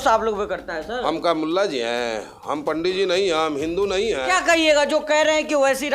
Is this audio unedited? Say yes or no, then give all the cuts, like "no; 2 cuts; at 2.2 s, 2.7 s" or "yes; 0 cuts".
no; 1 cut; at 4.3 s